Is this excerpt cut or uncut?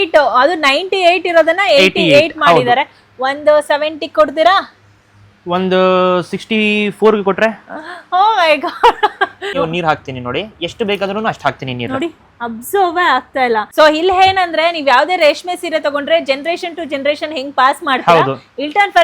cut